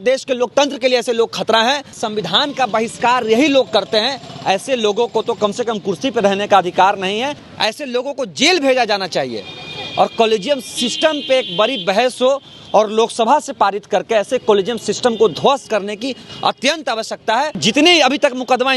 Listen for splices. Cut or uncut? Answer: cut